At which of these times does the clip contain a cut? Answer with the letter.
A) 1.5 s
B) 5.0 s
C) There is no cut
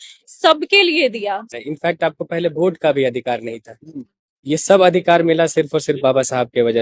A